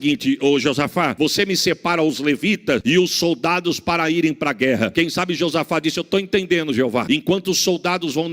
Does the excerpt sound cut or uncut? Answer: cut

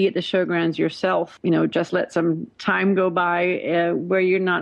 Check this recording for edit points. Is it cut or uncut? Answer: cut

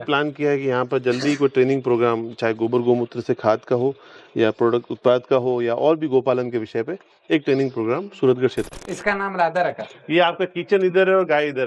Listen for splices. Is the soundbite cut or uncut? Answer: cut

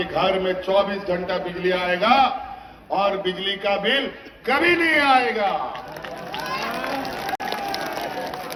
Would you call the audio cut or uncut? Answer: uncut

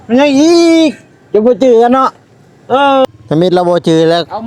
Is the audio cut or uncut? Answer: cut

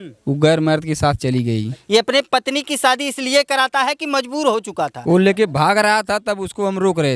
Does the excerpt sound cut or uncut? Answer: cut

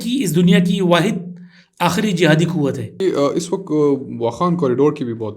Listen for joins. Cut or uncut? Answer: cut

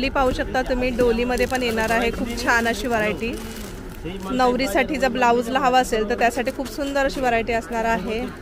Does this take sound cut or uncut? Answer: uncut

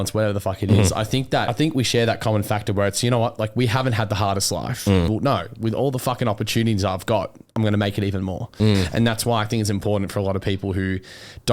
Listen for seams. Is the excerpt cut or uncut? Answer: cut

